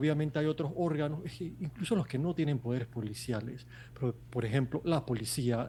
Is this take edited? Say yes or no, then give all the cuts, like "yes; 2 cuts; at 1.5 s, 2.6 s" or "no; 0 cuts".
no; 0 cuts